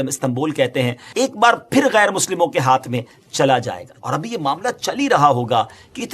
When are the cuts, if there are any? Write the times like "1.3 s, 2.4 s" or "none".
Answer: 1.0 s, 3.9 s

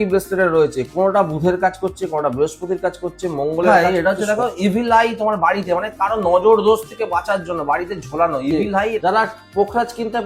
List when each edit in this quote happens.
3.7 s, 9.0 s

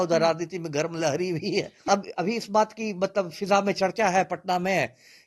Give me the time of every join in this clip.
1.9 s

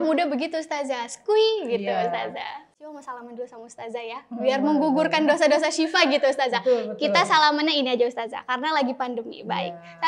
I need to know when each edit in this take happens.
2.6 s

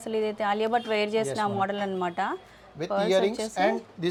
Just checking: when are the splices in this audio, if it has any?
none

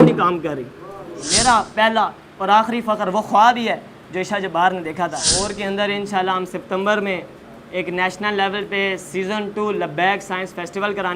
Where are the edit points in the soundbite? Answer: 1.2 s, 5.2 s

